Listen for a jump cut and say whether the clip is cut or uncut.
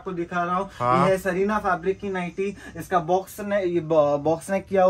uncut